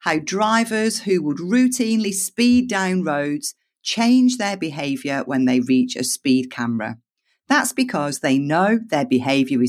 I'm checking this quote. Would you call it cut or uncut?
uncut